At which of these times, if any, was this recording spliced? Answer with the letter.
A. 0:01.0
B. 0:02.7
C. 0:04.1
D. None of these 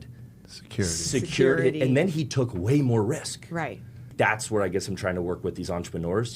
C